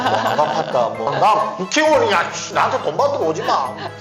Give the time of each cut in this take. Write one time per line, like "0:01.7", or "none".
0:01.1